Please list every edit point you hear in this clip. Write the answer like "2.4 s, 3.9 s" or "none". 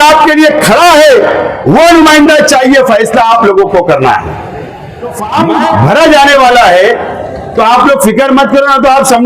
5.2 s